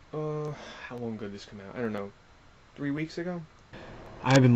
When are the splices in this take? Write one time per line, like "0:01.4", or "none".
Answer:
0:03.6